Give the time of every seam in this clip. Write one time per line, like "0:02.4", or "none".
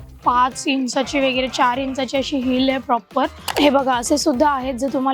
0:03.4